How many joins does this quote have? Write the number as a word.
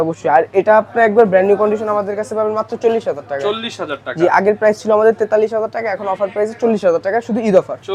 zero